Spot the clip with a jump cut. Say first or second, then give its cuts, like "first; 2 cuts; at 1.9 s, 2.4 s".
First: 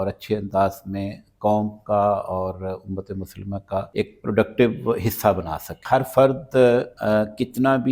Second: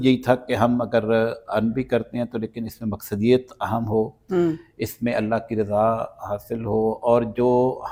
first; 3 cuts; at 3.9 s, 5.7 s, 6.9 s